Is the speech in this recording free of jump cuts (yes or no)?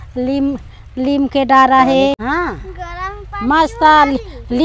no